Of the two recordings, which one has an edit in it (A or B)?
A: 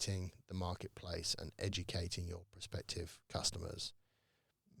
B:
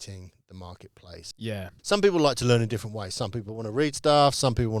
B